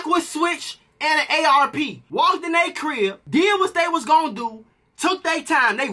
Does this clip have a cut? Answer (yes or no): no